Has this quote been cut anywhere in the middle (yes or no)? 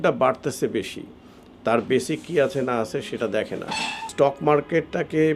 yes